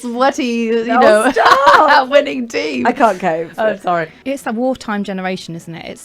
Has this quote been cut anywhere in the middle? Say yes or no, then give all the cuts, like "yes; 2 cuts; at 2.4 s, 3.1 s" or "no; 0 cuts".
yes; 1 cut; at 4.1 s